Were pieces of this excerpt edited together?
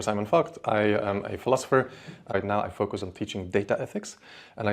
yes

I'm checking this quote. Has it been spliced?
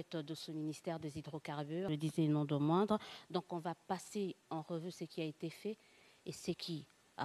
yes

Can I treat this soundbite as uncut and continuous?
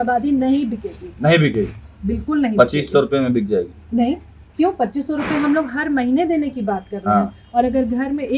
yes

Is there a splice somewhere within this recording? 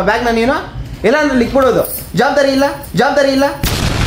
no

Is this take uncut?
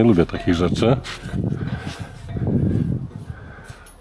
yes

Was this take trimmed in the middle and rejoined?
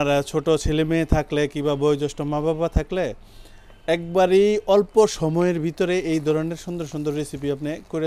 no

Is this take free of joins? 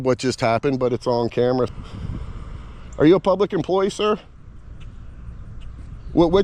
no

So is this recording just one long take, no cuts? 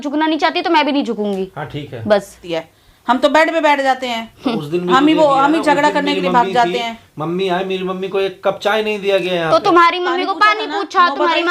no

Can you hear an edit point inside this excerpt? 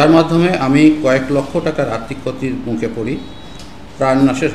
no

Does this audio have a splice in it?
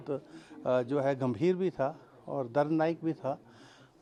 no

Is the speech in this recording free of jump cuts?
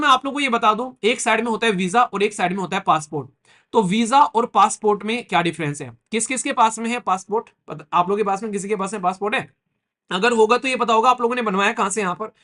yes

